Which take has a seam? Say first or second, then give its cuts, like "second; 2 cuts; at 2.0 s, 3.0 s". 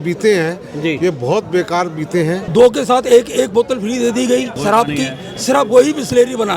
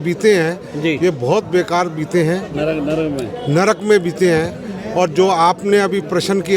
first; 2 cuts; at 2.5 s, 4.5 s